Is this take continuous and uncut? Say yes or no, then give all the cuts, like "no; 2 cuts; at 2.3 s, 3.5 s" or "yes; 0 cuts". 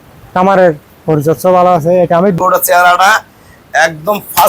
no; 1 cut; at 2.4 s